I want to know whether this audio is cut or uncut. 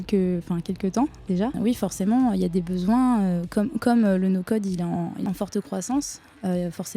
cut